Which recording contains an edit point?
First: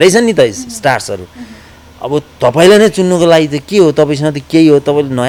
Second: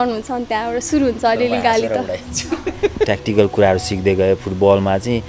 second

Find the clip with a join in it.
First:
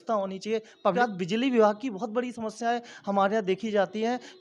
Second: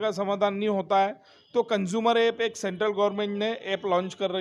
first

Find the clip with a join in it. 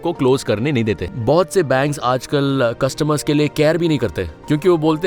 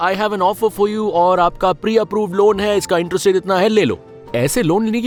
first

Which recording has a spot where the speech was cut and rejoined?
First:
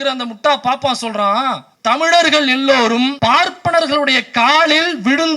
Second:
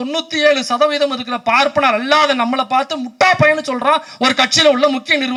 first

